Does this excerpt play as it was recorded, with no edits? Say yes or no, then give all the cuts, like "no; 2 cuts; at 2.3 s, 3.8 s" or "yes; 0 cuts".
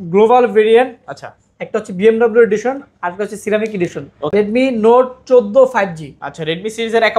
no; 1 cut; at 4.3 s